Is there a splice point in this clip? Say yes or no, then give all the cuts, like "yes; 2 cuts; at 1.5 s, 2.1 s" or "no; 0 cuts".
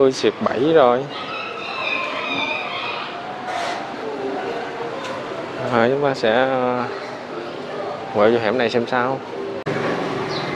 yes; 1 cut; at 9.7 s